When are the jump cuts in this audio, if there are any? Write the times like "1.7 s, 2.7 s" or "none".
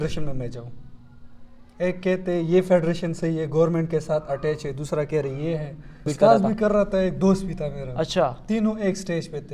6.1 s

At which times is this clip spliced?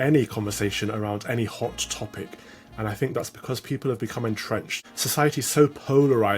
5.3 s

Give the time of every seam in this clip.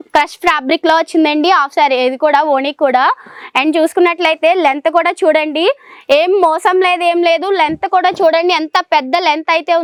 none

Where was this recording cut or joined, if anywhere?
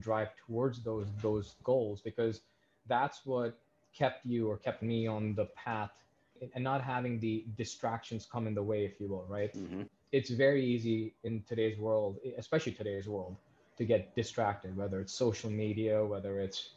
1.6 s, 6.4 s

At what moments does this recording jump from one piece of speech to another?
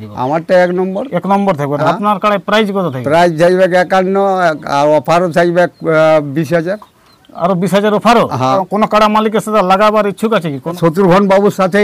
8.6 s, 10.8 s

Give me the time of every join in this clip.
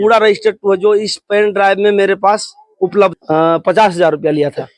3.2 s

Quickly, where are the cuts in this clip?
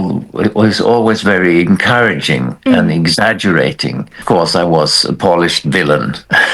4.2 s

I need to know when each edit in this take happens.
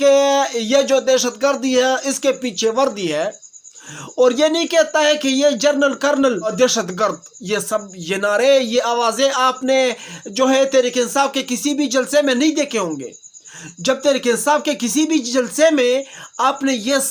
6.5 s

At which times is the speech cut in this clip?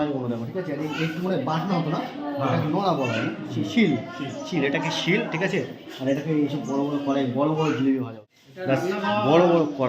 8.2 s

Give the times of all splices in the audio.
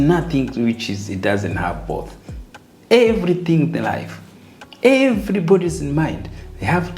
none

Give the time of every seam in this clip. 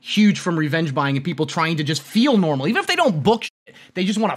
none

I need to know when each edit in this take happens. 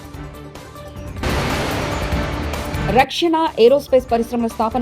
0.9 s, 2.8 s

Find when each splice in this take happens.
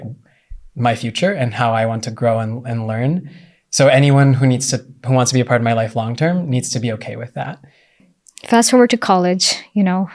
8.1 s

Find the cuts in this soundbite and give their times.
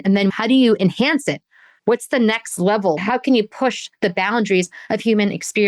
3.0 s

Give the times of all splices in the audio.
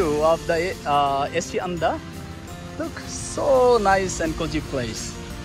none

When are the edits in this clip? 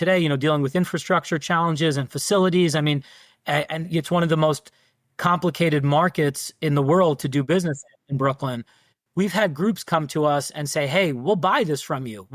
8.9 s

